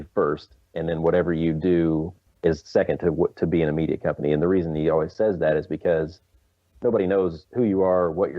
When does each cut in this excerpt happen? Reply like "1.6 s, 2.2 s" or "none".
2.2 s, 7.4 s